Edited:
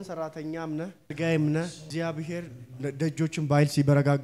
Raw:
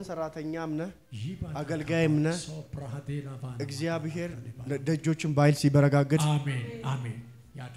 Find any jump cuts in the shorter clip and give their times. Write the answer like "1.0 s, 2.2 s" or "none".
1.1 s, 1.9 s